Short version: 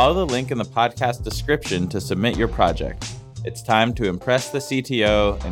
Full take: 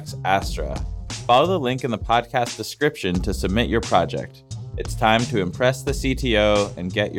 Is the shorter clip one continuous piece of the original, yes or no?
yes